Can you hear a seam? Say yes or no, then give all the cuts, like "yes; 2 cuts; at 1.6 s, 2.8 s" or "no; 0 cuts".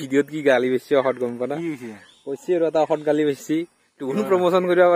no; 0 cuts